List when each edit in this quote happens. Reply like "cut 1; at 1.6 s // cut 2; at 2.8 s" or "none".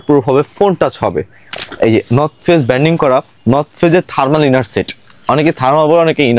cut 1; at 1.7 s

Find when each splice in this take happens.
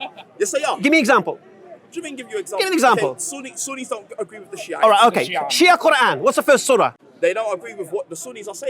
cut 1; at 7.0 s

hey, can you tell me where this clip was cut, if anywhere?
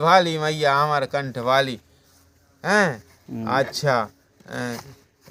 none

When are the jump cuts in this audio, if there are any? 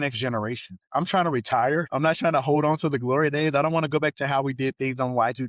cut 1; at 0.8 s // cut 2; at 1.9 s

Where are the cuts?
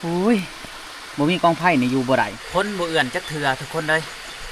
cut 1; at 2.4 s

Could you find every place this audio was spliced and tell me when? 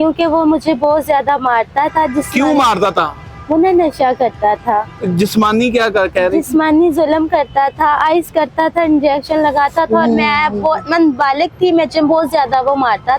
none

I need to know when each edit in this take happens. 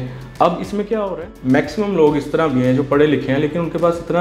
cut 1; at 1.1 s

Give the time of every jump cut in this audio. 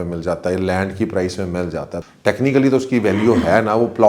cut 1; at 2.0 s

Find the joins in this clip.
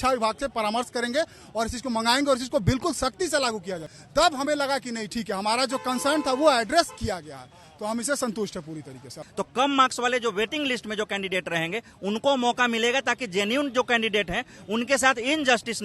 cut 1; at 3.9 s // cut 2; at 9.2 s

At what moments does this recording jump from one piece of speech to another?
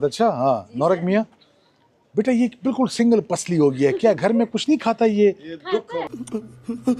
none

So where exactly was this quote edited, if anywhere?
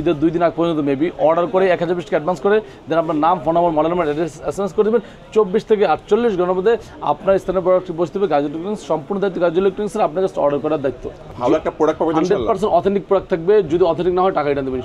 cut 1; at 11.2 s

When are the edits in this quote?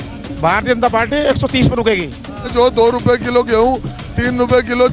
cut 1; at 2.5 s

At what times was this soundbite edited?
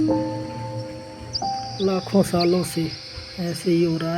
cut 1; at 1.7 s

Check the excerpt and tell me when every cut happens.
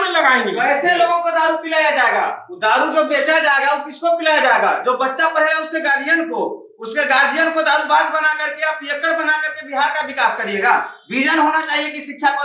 none

